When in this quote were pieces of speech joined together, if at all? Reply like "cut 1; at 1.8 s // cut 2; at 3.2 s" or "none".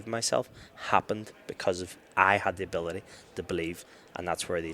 none